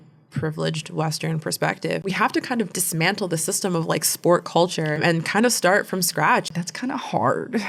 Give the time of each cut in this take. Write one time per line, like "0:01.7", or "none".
0:02.1
0:06.5